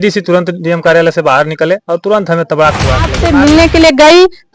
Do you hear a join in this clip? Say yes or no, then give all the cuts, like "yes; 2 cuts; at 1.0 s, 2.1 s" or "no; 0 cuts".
yes; 1 cut; at 3.1 s